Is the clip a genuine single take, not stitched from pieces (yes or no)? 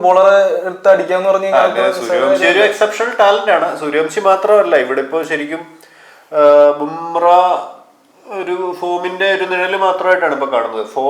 yes